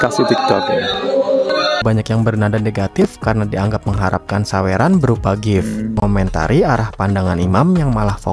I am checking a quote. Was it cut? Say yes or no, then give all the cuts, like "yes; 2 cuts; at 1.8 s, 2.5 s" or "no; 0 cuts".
yes; 2 cuts; at 1.8 s, 6.0 s